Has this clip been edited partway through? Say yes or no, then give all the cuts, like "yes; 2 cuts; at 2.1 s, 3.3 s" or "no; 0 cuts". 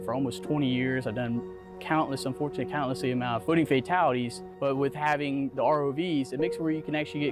yes; 2 cuts; at 3.4 s, 4.5 s